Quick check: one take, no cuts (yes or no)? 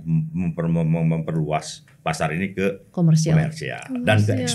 yes